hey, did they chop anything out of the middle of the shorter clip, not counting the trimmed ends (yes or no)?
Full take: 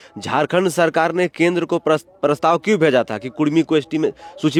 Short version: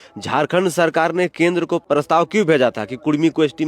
yes